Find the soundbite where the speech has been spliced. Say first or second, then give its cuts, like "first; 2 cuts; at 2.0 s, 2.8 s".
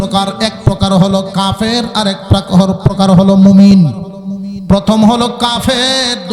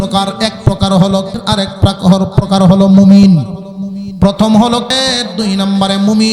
second; 2 cuts; at 1.3 s, 4.9 s